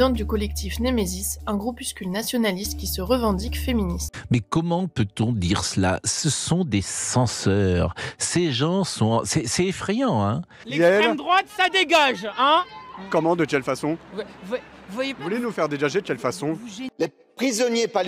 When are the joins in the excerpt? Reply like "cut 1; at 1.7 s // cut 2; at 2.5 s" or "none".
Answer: cut 1; at 4.1 s // cut 2; at 10.6 s // cut 3; at 16.8 s